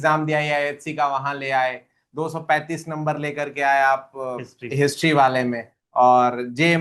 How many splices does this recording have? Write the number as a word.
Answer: zero